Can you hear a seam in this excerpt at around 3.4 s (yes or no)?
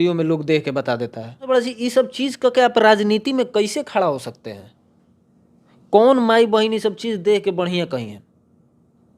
no